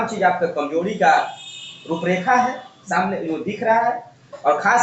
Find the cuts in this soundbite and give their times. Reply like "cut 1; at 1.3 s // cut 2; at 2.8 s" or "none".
none